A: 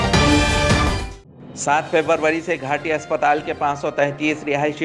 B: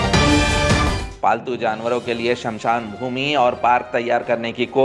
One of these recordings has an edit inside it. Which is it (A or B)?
B